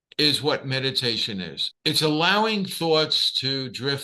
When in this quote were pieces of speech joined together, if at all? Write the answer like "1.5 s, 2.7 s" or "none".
1.6 s